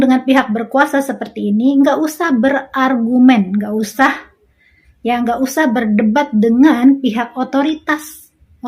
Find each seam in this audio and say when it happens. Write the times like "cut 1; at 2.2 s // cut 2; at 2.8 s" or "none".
none